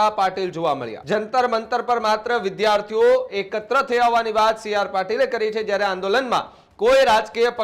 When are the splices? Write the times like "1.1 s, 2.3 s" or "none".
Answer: 0.9 s